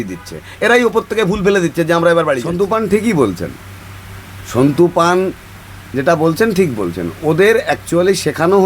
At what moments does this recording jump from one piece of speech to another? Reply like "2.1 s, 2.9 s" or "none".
2.5 s